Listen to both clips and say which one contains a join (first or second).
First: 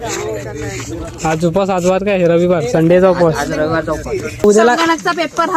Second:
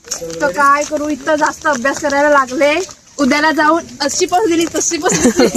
first